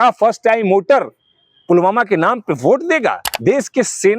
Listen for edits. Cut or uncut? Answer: cut